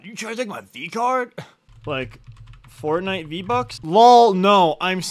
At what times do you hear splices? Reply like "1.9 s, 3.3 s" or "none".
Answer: 1.6 s, 3.8 s